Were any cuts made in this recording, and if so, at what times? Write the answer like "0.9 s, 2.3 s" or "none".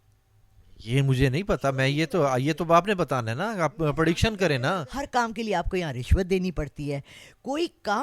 4.9 s